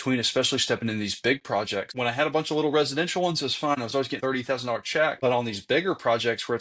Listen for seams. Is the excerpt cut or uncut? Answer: cut